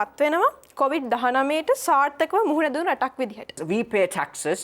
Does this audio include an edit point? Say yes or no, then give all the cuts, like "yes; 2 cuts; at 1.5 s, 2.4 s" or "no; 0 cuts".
yes; 1 cut; at 3.6 s